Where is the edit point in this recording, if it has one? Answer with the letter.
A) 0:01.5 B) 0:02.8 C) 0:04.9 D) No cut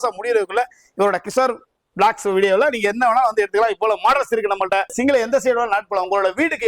C